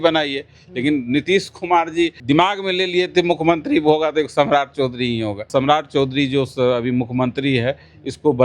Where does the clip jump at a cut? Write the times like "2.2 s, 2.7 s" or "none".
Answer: 2.2 s, 5.4 s